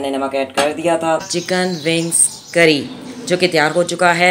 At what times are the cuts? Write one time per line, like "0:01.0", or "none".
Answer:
0:01.3